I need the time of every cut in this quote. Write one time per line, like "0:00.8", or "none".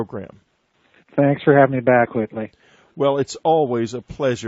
none

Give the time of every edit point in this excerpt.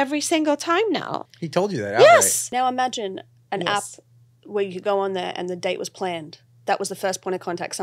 0:01.2
0:02.4

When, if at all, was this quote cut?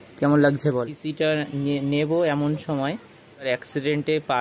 0:01.0
0:03.5

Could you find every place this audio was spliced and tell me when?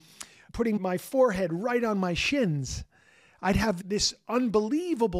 0:00.8
0:03.8

